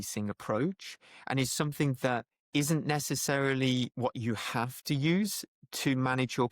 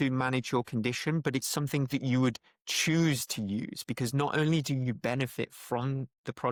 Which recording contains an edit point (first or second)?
first